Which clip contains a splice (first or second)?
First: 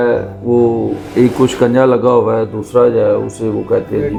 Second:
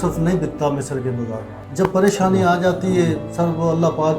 second